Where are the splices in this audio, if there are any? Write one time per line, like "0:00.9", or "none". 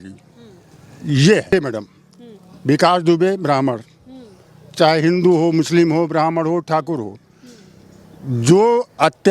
0:01.5